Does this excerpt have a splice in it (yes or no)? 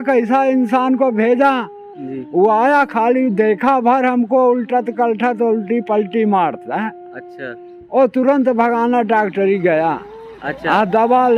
no